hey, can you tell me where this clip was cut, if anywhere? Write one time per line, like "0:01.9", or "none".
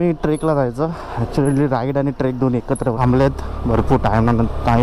0:02.9